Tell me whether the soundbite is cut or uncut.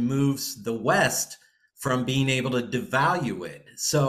uncut